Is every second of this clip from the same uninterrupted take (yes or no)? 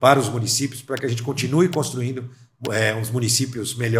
yes